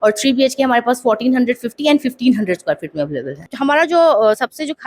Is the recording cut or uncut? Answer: cut